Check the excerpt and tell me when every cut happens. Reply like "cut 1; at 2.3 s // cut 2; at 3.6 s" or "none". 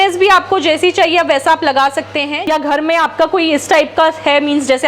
cut 1; at 2.3 s